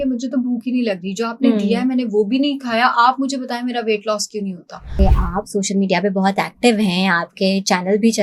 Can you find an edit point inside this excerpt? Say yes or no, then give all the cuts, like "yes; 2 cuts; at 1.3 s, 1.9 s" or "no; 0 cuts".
yes; 1 cut; at 4.9 s